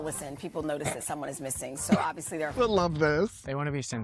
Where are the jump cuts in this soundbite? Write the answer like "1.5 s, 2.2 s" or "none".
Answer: 2.5 s